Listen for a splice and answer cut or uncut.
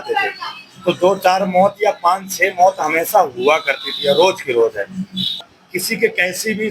cut